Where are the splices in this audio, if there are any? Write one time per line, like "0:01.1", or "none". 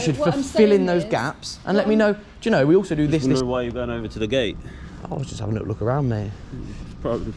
0:03.2